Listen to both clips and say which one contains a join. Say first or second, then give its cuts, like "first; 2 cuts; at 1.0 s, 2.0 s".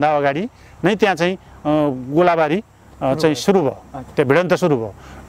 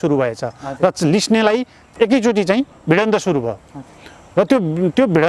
second; 1 cut; at 1.8 s